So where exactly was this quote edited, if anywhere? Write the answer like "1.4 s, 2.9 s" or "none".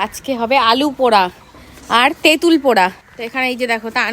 3.0 s

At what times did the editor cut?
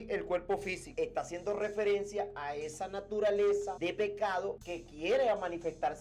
0.9 s, 3.7 s, 4.7 s

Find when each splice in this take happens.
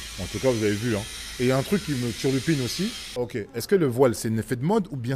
3.2 s

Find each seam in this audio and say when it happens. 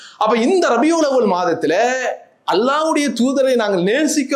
none

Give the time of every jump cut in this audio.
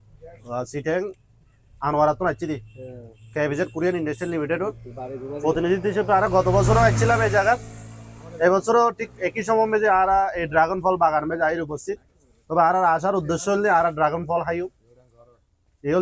none

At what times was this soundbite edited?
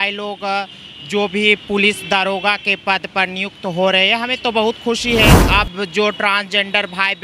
5.4 s

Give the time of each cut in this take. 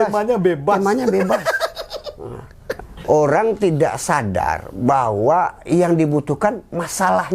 2.7 s

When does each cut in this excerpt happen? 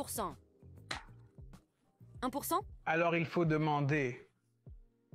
2.7 s

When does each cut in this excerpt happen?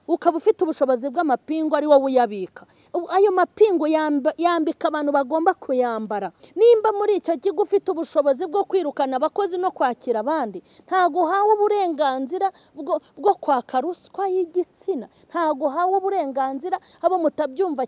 6.4 s

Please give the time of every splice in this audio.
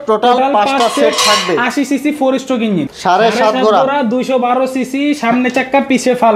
2.9 s

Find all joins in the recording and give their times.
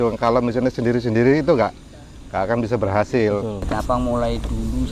3.6 s

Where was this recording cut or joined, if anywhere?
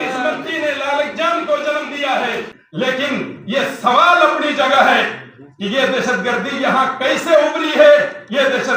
2.5 s

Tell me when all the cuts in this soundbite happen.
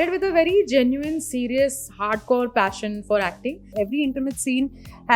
3.7 s

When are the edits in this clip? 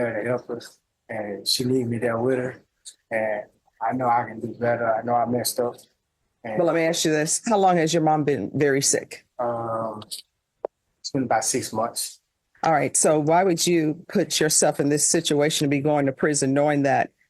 none

